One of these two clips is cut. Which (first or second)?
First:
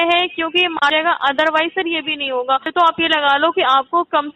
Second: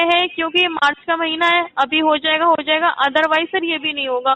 first